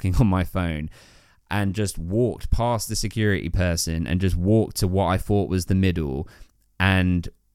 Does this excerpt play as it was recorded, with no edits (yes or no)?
yes